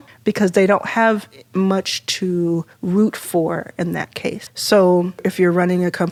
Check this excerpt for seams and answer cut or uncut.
uncut